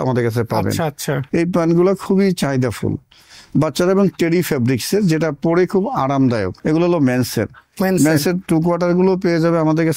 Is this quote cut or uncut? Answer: cut